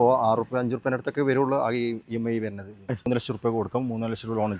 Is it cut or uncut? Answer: cut